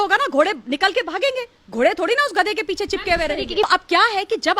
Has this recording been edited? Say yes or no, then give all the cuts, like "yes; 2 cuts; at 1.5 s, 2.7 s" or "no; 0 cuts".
yes; 1 cut; at 3.6 s